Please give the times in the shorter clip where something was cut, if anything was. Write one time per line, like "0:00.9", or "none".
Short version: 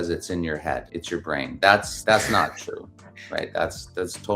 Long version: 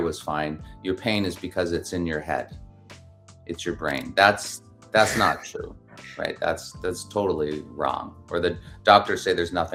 0:00.9
0:01.9